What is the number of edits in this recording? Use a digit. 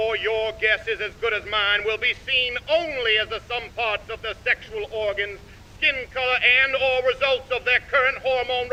0